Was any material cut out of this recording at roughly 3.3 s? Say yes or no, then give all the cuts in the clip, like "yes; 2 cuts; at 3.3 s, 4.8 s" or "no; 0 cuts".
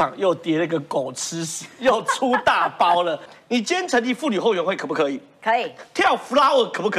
yes; 1 cut; at 3.3 s